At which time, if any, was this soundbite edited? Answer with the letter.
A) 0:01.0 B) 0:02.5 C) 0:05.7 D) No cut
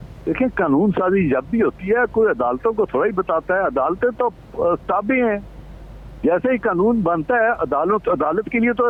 D